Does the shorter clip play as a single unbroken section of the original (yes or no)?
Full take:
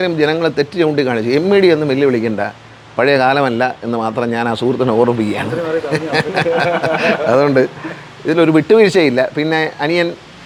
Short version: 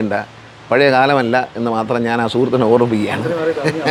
yes